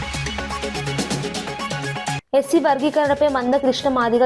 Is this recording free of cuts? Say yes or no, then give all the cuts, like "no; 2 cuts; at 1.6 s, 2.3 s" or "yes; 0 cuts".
no; 1 cut; at 2.2 s